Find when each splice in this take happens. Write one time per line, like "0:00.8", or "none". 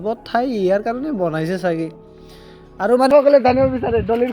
0:03.1

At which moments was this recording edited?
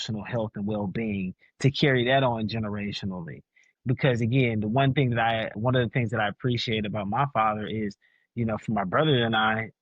0:03.8

